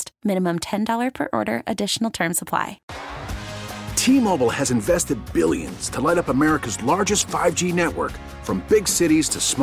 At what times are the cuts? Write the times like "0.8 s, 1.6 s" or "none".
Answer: 2.9 s